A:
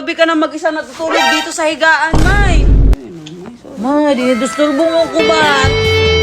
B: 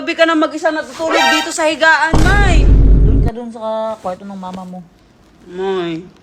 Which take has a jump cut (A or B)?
A